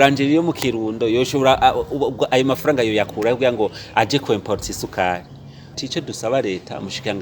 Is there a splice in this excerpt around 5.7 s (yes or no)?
yes